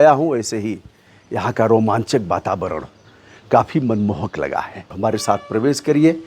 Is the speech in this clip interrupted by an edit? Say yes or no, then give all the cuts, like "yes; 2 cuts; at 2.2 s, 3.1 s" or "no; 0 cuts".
yes; 1 cut; at 4.9 s